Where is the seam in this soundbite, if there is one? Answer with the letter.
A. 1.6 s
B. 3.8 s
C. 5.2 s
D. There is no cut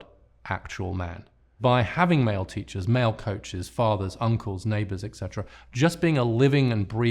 A